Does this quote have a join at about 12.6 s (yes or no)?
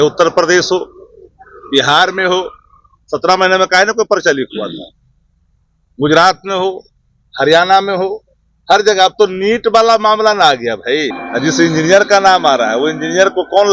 no